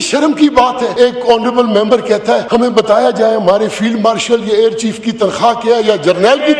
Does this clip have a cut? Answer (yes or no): yes